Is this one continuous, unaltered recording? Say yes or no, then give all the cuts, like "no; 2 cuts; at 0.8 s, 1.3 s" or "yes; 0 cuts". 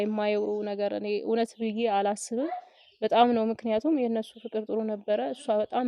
yes; 0 cuts